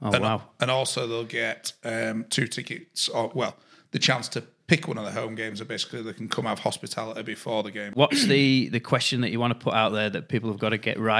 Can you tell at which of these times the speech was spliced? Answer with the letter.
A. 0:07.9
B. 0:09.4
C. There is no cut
A